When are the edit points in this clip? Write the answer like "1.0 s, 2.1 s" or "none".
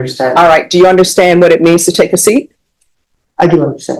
none